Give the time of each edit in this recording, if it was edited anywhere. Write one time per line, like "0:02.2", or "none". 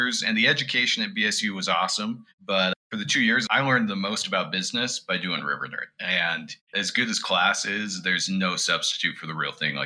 0:02.7
0:06.6